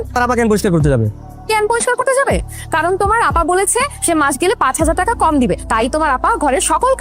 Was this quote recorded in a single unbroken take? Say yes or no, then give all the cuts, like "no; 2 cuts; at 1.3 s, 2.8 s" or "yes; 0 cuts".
yes; 0 cuts